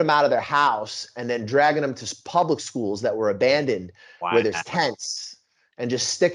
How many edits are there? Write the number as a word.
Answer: zero